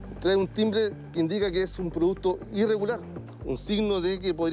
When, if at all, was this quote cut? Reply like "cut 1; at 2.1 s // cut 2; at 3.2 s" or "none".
cut 1; at 3.2 s